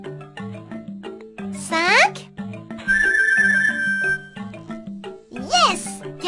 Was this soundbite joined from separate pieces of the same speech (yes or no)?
yes